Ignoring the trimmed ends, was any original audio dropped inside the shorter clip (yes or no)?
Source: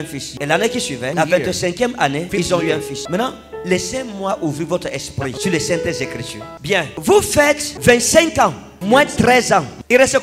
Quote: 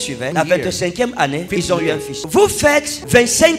yes